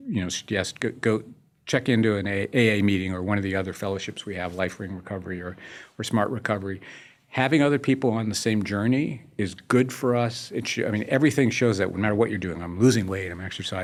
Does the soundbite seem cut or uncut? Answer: uncut